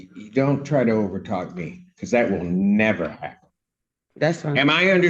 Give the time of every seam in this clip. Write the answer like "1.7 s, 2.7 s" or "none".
none